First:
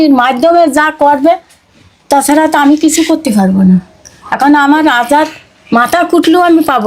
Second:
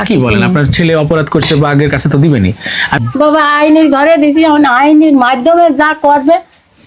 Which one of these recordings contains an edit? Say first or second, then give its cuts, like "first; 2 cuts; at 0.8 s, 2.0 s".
second; 1 cut; at 3.0 s